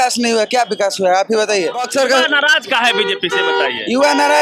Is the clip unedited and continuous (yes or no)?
no